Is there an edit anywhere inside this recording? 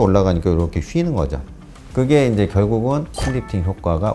yes; 1 cut; at 3.1 s

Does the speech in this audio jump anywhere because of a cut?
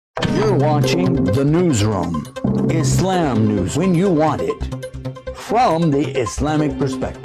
yes; 1 cut; at 3.7 s

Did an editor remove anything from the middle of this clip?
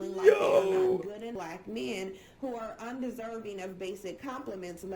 yes; 1 cut; at 1.1 s

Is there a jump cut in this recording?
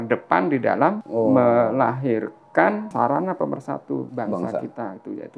yes; 3 cuts; at 1.0 s, 2.9 s, 4.1 s

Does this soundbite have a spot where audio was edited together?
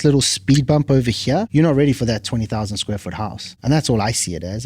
yes; 2 cuts; at 1.5 s, 3.5 s

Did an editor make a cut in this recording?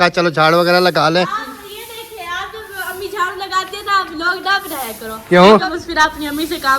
yes; 1 cut; at 5.7 s

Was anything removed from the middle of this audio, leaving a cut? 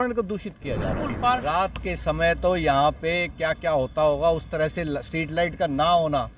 yes; 1 cut; at 1.3 s

